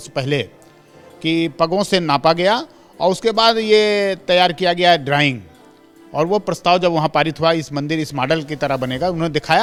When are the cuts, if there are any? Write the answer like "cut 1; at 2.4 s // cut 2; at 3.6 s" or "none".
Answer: none